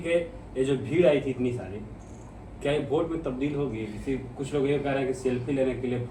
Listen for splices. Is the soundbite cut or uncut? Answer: uncut